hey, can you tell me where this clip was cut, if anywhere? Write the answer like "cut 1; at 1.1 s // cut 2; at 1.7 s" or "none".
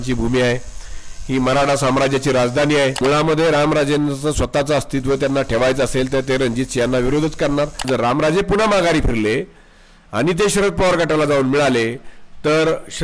cut 1; at 3.0 s // cut 2; at 7.8 s